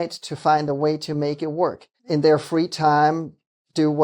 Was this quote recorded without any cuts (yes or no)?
no